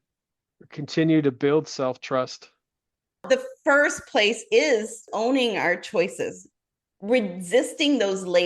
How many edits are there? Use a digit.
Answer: 2